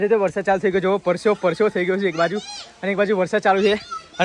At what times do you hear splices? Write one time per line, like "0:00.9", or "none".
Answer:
none